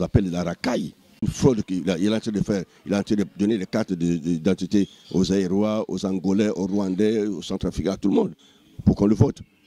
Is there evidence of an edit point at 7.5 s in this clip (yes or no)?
no